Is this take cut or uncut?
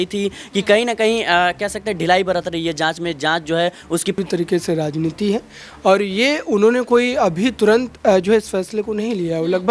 cut